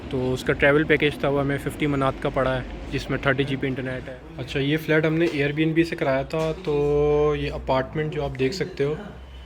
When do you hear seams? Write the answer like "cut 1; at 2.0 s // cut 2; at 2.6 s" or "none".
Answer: cut 1; at 4.0 s